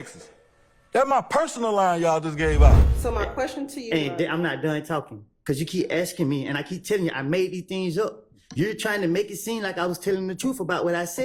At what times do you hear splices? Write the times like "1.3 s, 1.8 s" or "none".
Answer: 2.9 s